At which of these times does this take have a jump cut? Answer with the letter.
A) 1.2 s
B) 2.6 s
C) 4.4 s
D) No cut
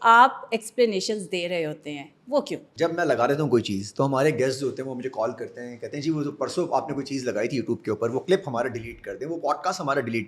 B